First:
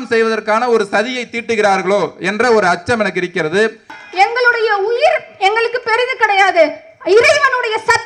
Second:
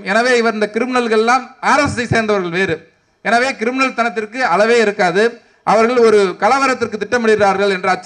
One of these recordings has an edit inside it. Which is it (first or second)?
first